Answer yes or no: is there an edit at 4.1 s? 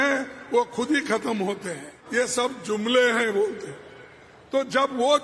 no